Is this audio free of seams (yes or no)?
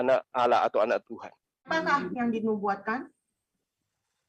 no